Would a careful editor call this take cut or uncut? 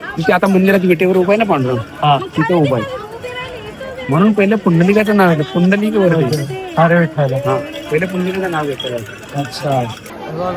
uncut